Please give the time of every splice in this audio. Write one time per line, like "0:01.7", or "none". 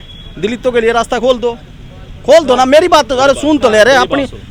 none